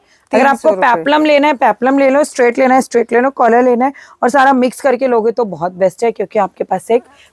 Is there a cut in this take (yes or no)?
no